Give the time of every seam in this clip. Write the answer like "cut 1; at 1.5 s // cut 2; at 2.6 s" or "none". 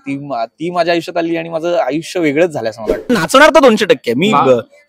cut 1; at 3.1 s